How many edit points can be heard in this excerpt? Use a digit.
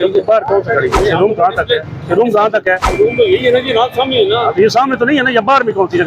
2